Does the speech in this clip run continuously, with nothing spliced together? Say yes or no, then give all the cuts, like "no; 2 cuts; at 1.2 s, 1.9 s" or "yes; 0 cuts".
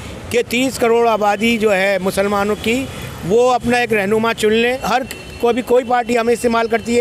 no; 1 cut; at 4.8 s